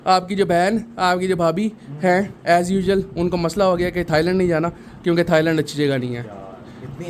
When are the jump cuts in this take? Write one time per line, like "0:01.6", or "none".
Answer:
none

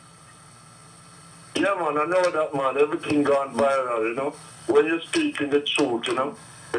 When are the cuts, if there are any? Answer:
0:01.0

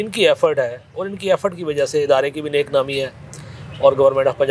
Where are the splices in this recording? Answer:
none

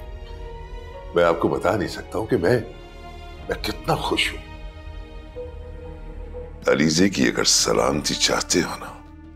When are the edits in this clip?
0:06.5

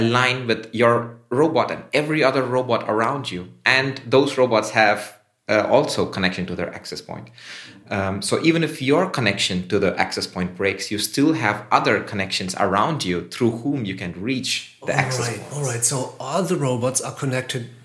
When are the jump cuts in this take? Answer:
none

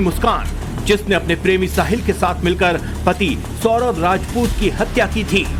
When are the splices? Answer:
none

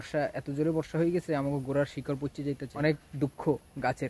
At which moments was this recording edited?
0:02.7

